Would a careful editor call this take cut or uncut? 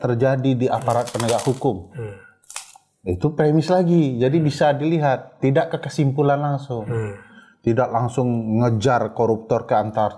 uncut